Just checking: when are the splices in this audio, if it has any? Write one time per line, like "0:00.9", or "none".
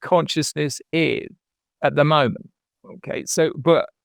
none